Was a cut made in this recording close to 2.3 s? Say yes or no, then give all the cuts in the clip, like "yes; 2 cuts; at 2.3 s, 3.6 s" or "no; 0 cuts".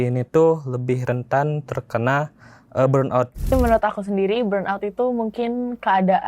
no; 1 cut; at 3.5 s